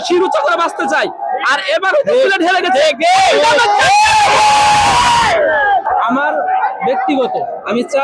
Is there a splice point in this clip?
no; 0 cuts

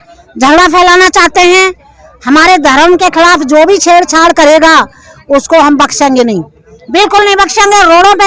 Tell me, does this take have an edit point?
no; 0 cuts

